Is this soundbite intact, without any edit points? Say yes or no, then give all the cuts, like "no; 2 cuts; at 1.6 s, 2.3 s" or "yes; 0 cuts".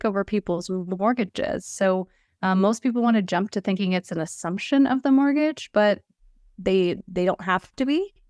yes; 0 cuts